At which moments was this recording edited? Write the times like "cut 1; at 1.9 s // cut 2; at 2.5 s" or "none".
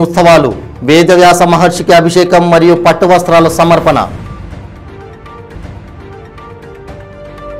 none